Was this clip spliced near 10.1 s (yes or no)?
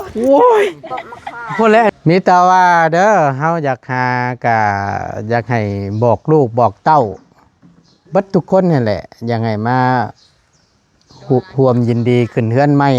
no